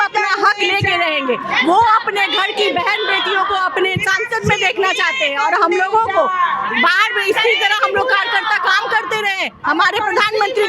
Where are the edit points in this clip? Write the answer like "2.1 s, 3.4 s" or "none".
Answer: none